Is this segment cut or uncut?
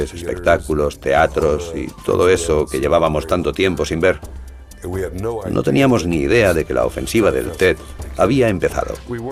uncut